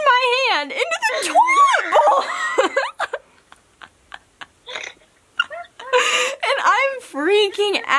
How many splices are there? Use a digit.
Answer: 0